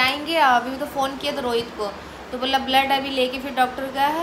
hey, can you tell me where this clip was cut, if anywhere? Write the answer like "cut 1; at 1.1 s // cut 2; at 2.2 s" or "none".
none